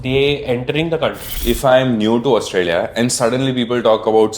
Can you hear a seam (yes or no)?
yes